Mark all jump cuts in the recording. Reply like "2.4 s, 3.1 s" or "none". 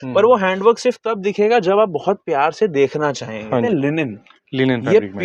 3.7 s